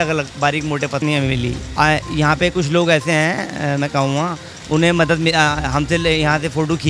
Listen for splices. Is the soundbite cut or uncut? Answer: cut